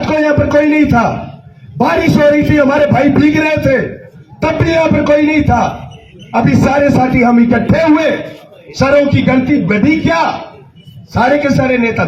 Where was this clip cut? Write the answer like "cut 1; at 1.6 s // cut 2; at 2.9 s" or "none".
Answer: none